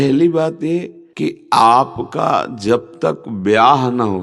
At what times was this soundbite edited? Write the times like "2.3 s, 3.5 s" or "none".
1.0 s